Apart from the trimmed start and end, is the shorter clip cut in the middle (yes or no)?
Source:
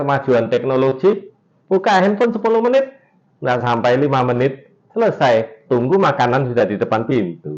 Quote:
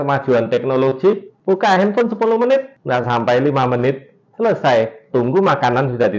yes